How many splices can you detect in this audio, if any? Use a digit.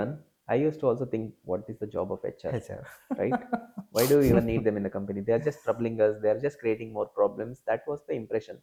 0